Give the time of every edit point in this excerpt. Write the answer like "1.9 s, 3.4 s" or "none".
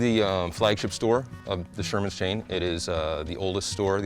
1.4 s